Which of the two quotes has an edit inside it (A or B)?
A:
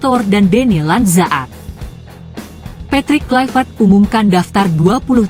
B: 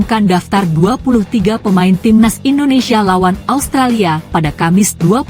A